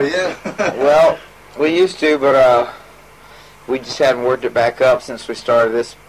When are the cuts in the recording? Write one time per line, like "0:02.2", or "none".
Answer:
none